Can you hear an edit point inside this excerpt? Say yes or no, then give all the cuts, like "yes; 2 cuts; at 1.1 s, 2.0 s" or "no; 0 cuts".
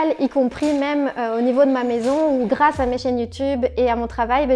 no; 0 cuts